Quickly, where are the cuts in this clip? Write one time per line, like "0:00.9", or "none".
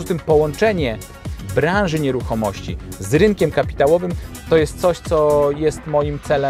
none